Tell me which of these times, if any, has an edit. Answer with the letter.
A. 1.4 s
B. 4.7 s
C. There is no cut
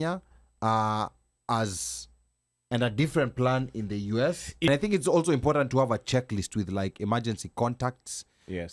B